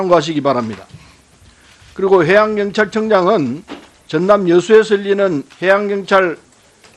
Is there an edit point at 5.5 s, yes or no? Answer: yes